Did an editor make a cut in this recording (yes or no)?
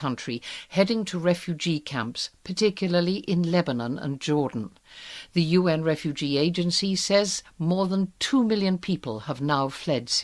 yes